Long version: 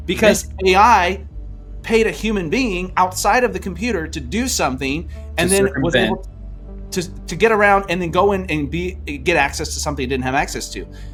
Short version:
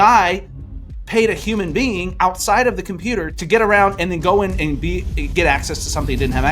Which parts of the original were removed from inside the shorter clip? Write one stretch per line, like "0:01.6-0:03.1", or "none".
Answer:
0:04.1-0:07.3

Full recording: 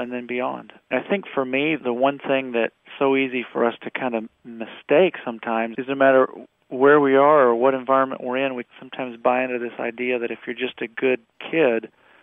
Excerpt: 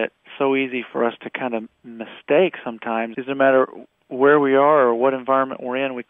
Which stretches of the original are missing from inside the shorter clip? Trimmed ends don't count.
none

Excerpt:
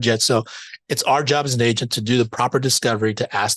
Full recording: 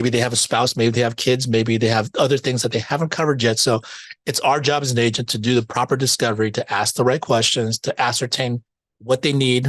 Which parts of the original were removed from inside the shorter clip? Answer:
none

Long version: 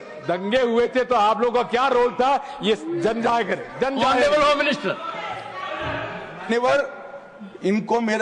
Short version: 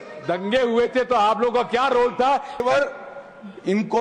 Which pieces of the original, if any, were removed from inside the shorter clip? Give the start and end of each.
0:02.6-0:06.6

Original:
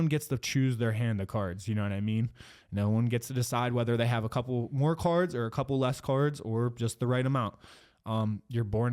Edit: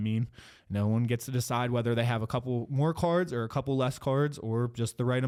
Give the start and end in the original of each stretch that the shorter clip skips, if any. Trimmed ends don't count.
none

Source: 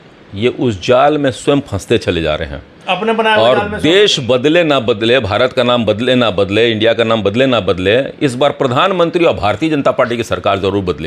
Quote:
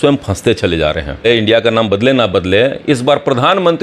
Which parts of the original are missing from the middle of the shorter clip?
0:02.6-0:06.5

